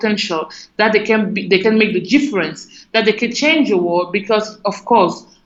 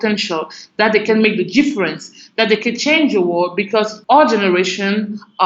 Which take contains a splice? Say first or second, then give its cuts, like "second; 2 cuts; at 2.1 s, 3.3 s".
second; 2 cuts; at 1.0 s, 3.9 s